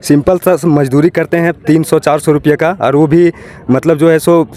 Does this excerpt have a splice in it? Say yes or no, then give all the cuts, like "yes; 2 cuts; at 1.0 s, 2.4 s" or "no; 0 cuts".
no; 0 cuts